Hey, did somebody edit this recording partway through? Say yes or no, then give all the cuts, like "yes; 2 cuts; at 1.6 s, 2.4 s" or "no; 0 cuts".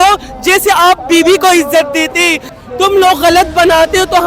yes; 1 cut; at 2.5 s